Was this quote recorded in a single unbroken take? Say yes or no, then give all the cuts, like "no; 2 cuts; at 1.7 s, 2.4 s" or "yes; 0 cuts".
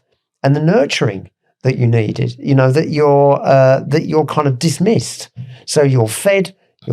yes; 0 cuts